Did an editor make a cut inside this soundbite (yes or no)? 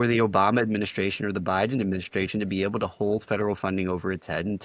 no